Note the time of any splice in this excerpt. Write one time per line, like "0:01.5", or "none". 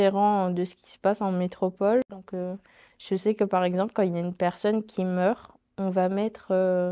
none